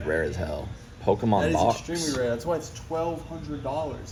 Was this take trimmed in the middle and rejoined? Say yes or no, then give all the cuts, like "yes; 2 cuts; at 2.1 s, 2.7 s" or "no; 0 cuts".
no; 0 cuts